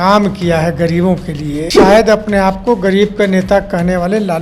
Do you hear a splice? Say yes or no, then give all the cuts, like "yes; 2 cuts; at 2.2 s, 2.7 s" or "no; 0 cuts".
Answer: yes; 1 cut; at 1.8 s